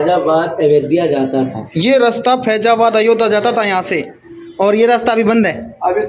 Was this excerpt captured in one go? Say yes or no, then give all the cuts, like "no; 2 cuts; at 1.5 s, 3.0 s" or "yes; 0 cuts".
yes; 0 cuts